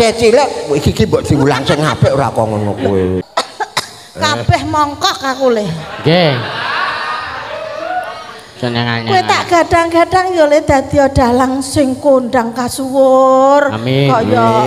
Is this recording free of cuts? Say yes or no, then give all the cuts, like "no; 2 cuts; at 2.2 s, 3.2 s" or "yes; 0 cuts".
no; 1 cut; at 3.2 s